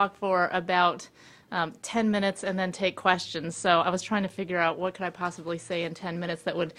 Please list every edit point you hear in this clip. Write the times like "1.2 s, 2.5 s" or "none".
none